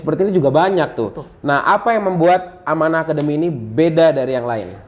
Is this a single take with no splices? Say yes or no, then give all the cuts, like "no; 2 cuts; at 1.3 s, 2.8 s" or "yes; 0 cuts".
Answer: yes; 0 cuts